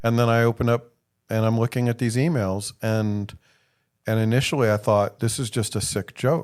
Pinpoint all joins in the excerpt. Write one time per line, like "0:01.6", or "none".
none